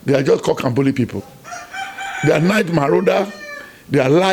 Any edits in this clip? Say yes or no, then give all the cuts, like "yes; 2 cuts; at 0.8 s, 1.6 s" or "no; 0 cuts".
no; 0 cuts